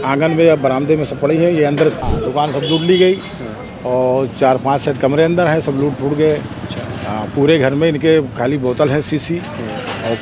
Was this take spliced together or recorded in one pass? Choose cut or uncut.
cut